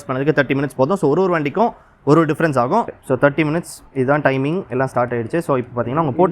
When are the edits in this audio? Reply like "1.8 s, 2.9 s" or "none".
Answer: 3.0 s

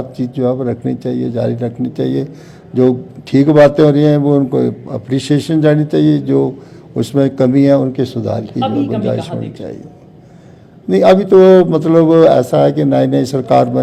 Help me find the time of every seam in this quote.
none

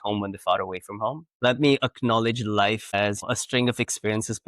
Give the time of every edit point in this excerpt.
1.3 s, 3.2 s

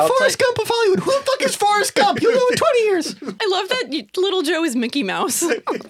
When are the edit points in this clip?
3.3 s

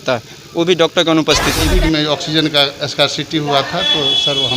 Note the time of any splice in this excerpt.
1.7 s

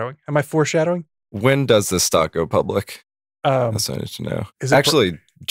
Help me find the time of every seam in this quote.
4.5 s

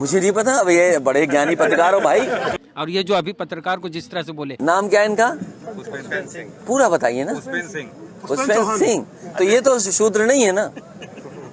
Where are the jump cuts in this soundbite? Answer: 2.5 s, 4.6 s

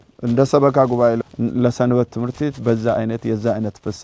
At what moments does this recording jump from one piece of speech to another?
1.2 s

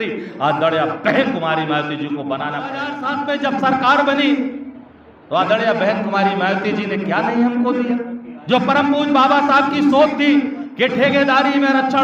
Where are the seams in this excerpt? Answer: 3.0 s

